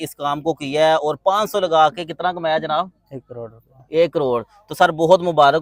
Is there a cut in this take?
no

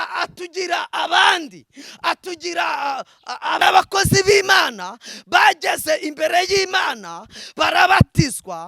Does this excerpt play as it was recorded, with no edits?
no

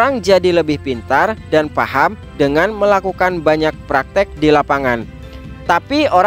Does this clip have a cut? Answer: no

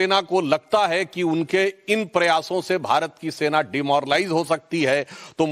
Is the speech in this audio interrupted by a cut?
yes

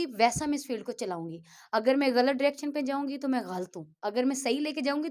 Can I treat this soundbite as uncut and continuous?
yes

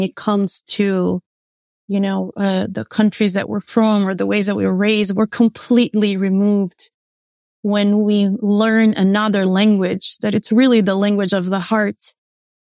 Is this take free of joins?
yes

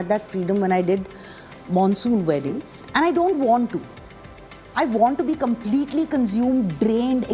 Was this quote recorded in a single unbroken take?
no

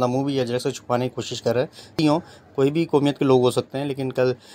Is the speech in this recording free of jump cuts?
no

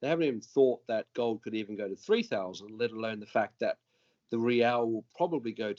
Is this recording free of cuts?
yes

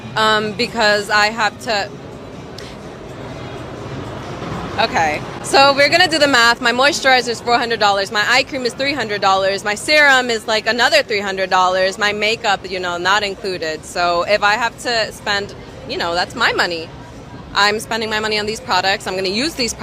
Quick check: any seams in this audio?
yes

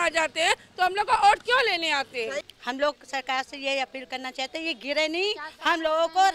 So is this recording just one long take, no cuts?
no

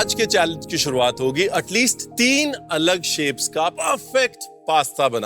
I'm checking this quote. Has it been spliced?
yes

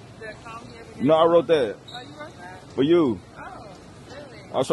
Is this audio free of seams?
yes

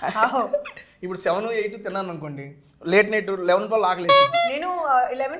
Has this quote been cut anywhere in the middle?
no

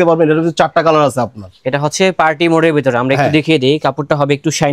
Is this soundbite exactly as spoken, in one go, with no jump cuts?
yes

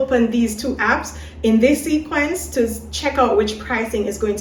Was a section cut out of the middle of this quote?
no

